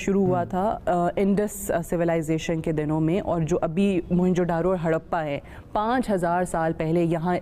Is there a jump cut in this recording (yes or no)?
no